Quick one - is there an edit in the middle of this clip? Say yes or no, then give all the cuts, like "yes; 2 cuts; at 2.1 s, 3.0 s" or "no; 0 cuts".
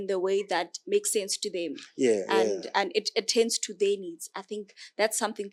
no; 0 cuts